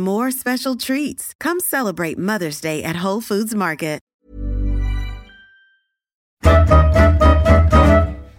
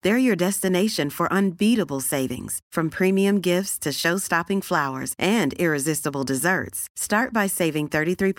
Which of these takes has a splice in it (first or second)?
first